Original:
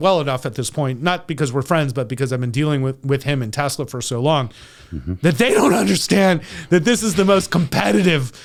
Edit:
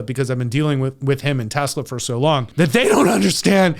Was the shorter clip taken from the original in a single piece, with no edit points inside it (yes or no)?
no